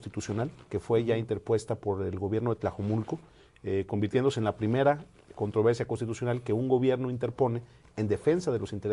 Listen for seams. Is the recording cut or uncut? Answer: uncut